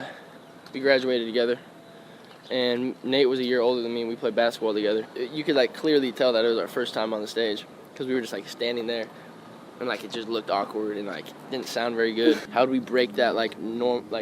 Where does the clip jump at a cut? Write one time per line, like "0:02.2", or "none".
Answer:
0:05.1
0:12.4